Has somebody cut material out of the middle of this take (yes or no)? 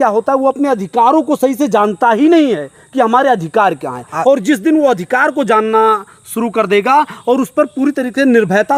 no